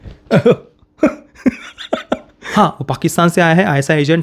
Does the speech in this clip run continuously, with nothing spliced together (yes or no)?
no